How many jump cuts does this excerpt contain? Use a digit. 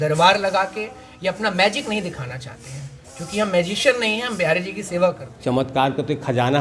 1